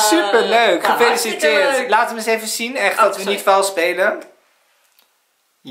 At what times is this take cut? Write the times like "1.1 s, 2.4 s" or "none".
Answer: none